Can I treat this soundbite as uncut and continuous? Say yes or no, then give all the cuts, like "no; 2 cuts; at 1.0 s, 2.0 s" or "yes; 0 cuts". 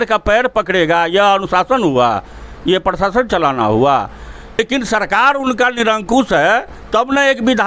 no; 1 cut; at 4.6 s